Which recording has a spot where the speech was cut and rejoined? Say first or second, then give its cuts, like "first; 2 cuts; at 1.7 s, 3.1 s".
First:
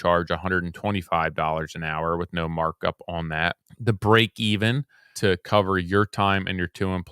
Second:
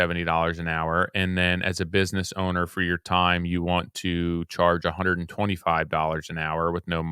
first; 2 cuts; at 3.7 s, 5.1 s